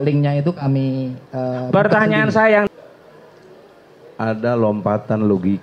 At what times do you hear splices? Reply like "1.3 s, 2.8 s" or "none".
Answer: 2.7 s